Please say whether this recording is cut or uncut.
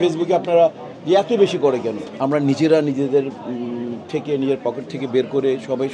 cut